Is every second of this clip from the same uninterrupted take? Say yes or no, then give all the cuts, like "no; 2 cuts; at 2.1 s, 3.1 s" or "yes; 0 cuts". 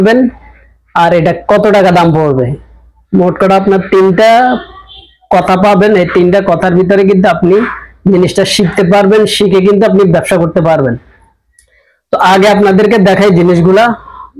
yes; 0 cuts